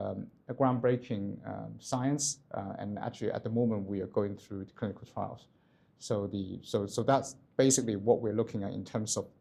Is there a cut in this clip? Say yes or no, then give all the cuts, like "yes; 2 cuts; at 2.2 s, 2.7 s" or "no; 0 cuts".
no; 0 cuts